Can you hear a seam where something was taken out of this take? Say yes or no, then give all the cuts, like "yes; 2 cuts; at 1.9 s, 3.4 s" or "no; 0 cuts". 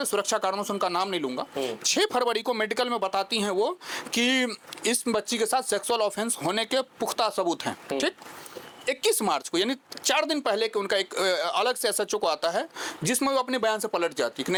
no; 0 cuts